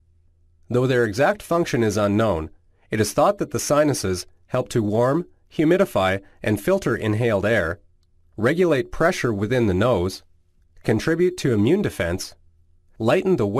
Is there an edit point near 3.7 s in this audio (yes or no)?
yes